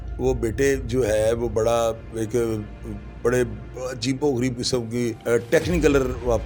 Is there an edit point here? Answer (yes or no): yes